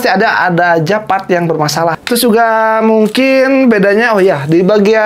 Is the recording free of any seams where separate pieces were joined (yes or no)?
no